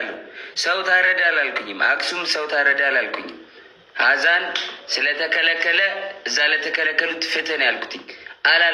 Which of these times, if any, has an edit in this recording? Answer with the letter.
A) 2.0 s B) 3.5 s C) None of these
C